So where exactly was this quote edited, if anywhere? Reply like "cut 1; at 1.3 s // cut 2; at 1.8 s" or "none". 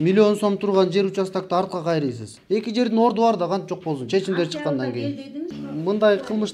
cut 1; at 2.3 s // cut 2; at 5.6 s